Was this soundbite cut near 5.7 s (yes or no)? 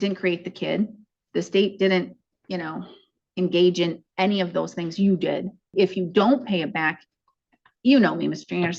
yes